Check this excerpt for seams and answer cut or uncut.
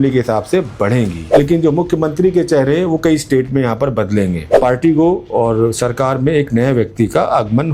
cut